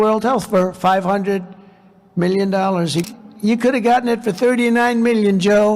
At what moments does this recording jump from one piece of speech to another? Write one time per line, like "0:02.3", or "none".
0:03.1

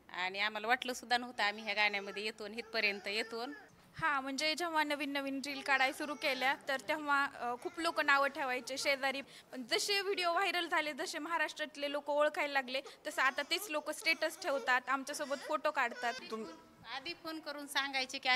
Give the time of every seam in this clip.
0:03.6
0:09.2
0:16.2

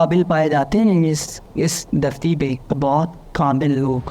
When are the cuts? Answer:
0:01.4
0:02.6

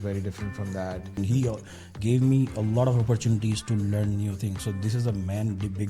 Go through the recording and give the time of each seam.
0:01.2

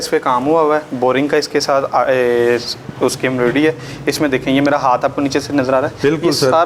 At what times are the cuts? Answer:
none

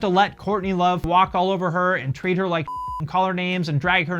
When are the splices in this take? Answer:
0:01.0

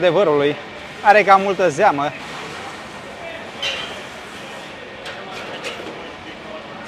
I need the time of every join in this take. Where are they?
none

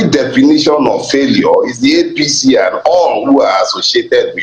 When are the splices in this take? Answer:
none

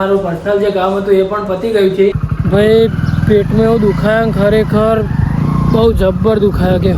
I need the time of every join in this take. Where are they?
0:02.3

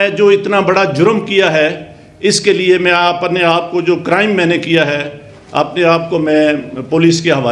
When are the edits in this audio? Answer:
none

